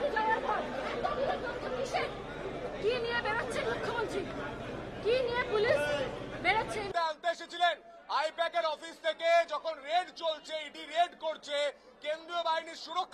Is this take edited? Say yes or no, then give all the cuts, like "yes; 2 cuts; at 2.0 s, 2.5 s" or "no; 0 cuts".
no; 0 cuts